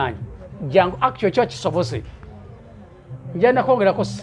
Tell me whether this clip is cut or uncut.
uncut